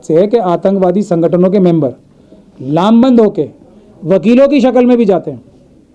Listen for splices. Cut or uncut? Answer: uncut